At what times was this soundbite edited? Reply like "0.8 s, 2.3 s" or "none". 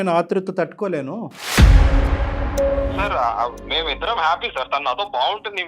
3.0 s